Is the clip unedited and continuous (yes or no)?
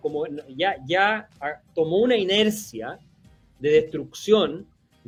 yes